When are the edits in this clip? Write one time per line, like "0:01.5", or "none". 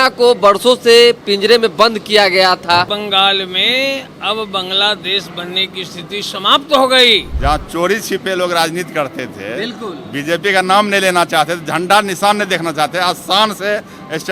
0:02.9
0:07.3